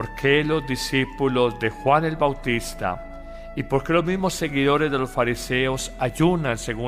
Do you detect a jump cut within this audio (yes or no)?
no